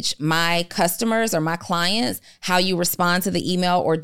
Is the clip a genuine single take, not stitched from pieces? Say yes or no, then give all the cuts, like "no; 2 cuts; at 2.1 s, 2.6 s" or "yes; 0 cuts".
yes; 0 cuts